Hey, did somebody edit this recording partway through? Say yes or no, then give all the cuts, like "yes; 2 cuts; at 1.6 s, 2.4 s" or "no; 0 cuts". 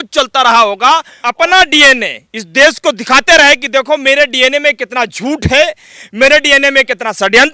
yes; 1 cut; at 1.2 s